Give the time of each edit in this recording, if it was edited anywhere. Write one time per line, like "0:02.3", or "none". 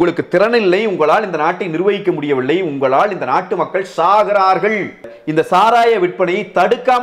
0:05.2